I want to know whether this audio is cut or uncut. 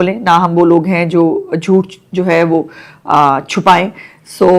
uncut